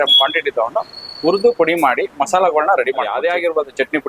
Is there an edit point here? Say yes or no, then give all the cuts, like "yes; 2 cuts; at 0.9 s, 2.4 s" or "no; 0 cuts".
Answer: yes; 1 cut; at 3.1 s